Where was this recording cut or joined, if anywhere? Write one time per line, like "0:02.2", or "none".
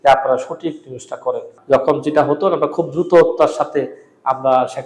0:01.5